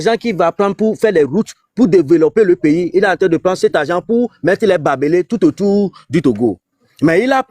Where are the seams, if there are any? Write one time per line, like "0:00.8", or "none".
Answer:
none